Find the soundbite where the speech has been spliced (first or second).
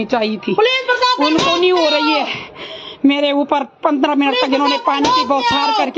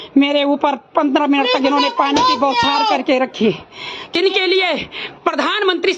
second